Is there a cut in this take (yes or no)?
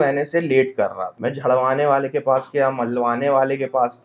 yes